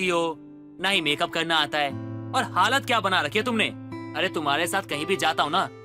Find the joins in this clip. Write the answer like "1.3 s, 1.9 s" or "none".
none